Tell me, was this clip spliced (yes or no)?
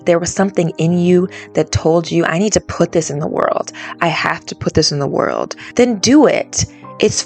yes